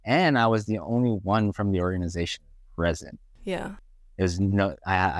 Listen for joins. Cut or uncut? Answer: uncut